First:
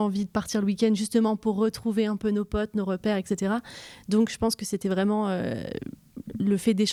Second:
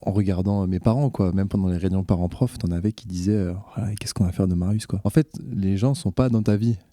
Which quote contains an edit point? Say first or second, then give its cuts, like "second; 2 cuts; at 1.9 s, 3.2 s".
second; 1 cut; at 4.9 s